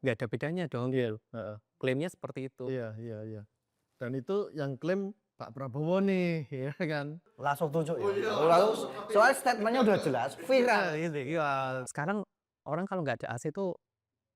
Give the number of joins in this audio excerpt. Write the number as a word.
two